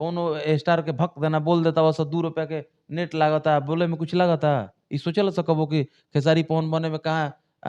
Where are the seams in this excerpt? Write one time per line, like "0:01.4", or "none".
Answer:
none